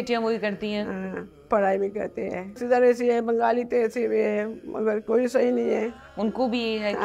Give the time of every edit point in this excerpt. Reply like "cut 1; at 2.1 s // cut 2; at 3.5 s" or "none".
cut 1; at 2.6 s // cut 2; at 6.0 s